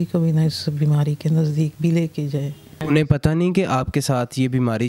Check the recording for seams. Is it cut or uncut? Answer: cut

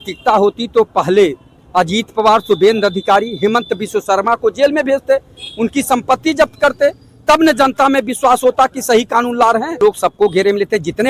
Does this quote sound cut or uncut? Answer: cut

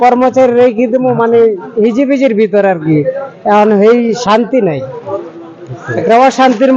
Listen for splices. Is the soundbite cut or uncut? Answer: uncut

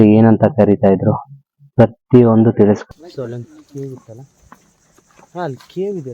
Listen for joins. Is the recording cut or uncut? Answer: cut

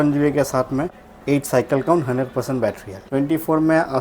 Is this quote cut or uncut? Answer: cut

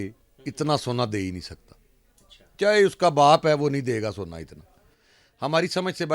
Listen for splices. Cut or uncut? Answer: uncut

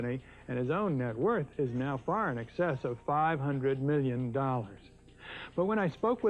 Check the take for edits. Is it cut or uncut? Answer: cut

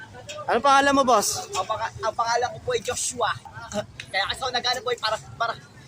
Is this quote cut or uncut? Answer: cut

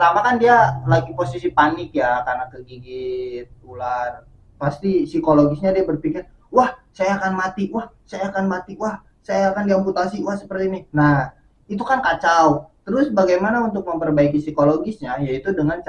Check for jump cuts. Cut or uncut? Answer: uncut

